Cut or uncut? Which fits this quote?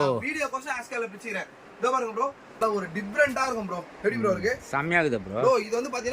cut